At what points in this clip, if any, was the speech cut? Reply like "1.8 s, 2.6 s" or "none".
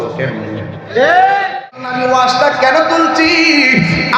1.8 s